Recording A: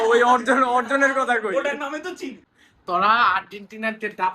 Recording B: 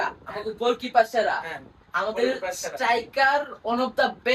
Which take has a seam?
A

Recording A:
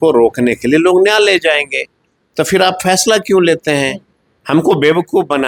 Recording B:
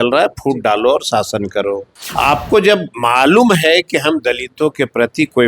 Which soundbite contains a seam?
B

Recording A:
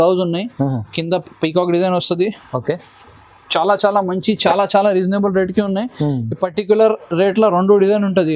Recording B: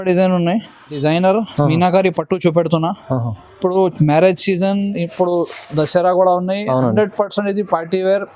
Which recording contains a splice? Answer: B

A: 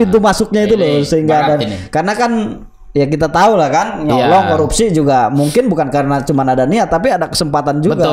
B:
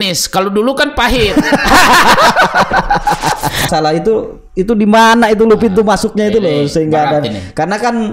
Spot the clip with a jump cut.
B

